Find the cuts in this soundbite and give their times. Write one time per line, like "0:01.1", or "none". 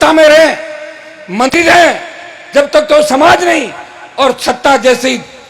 0:01.5